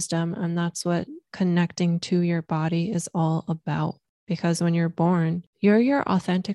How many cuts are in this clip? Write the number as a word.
two